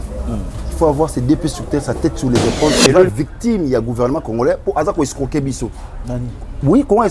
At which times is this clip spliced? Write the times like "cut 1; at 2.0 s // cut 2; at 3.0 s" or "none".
cut 1; at 2.8 s

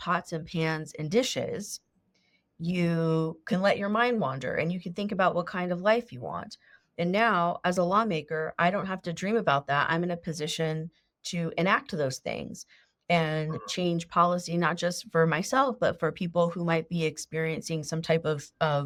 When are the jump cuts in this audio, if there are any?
none

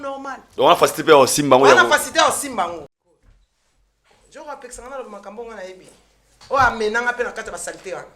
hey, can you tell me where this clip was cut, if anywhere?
cut 1; at 2.9 s

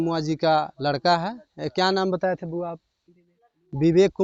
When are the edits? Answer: none

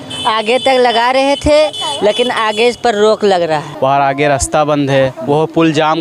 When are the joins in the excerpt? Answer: cut 1; at 3.7 s

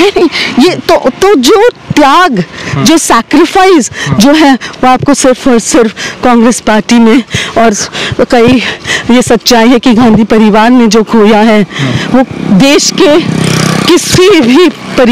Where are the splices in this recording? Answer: none

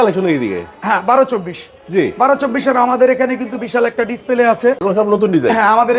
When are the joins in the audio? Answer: cut 1; at 4.8 s

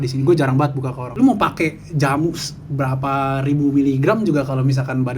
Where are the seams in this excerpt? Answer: cut 1; at 1.1 s

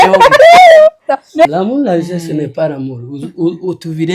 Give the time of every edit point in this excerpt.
cut 1; at 1.5 s

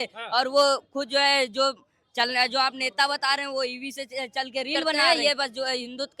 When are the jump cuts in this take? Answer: cut 1; at 5.0 s

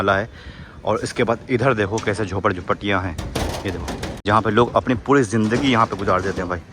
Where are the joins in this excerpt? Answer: none

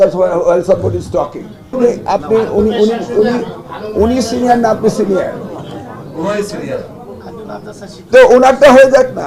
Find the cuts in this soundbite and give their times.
cut 1; at 1.7 s

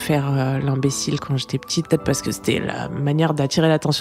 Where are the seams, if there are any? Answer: cut 1; at 1.9 s

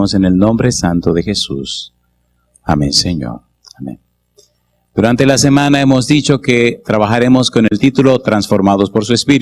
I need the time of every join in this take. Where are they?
cut 1; at 8.4 s

